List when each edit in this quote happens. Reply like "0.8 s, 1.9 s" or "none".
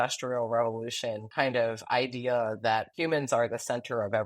1.2 s, 2.9 s